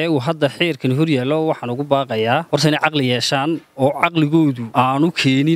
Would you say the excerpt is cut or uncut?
cut